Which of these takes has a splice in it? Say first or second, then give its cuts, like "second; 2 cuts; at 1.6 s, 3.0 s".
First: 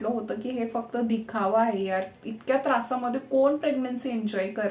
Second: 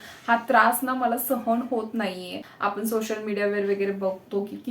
second; 1 cut; at 2.5 s